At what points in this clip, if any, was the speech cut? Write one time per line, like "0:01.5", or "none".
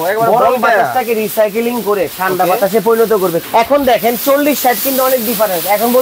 0:03.4